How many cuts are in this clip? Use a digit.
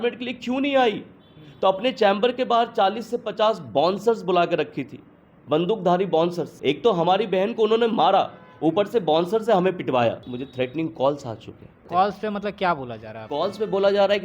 3